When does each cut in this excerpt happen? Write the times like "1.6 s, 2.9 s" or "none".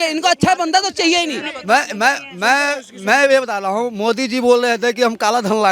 1.5 s